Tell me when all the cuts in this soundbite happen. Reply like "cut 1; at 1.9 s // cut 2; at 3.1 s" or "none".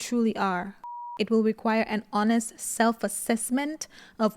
cut 1; at 1.0 s

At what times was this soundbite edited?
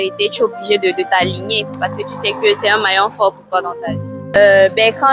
cut 1; at 4.1 s

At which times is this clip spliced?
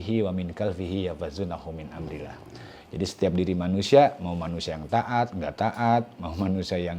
none

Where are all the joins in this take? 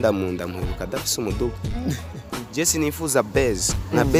none

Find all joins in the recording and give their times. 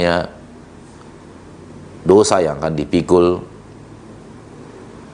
none

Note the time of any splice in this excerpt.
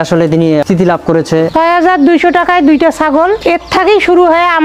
cut 1; at 1.5 s // cut 2; at 3.4 s

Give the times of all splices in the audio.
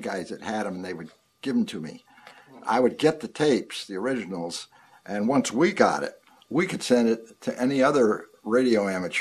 cut 1; at 3.3 s

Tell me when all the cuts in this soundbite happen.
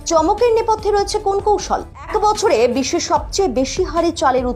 cut 1; at 2.1 s

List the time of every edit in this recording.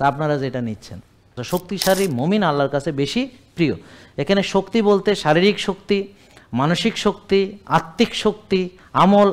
cut 1; at 1.4 s

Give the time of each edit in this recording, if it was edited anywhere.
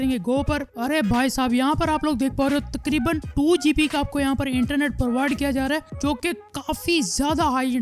none

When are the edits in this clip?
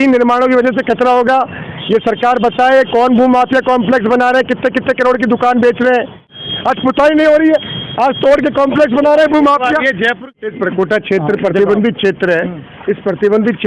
cut 1; at 6.4 s // cut 2; at 10.3 s

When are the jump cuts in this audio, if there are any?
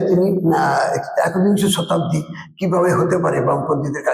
none

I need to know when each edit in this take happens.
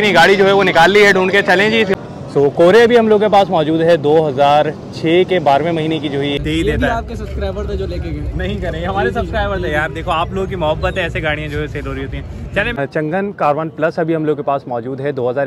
cut 1; at 1.9 s // cut 2; at 6.4 s // cut 3; at 12.8 s

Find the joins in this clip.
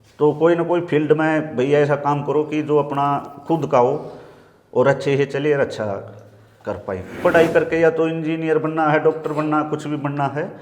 cut 1; at 7.2 s

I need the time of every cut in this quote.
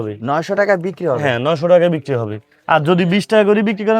none

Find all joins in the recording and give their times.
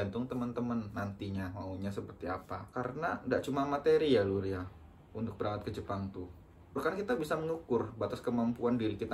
cut 1; at 2.7 s // cut 2; at 6.8 s

